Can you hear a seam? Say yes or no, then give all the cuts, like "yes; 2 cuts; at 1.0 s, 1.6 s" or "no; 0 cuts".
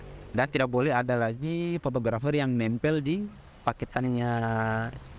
no; 0 cuts